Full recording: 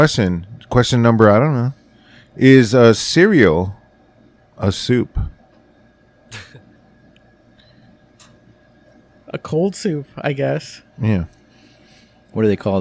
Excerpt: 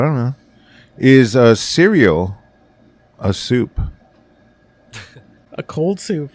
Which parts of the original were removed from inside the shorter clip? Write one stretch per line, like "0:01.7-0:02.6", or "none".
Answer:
0:06.8-0:09.2